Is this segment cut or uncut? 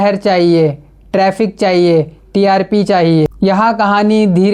cut